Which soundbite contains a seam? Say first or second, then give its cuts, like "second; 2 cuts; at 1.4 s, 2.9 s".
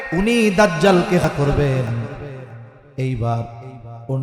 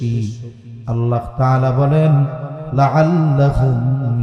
first; 1 cut; at 1.2 s